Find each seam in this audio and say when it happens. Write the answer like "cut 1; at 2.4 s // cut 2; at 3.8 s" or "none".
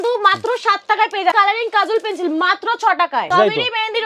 cut 1; at 1.3 s // cut 2; at 3.3 s